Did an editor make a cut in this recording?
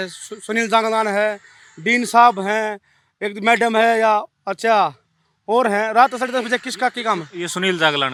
no; 0 cuts

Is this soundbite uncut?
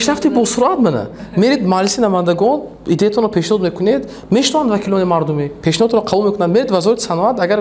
yes; 0 cuts

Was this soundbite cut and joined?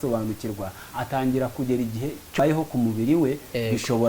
yes; 1 cut; at 2.4 s

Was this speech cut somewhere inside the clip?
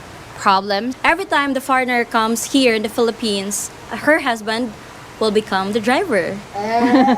yes; 1 cut; at 0.9 s

